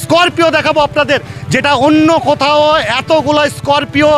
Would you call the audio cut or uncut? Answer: uncut